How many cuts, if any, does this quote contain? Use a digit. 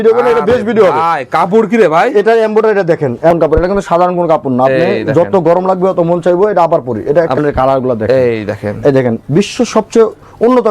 2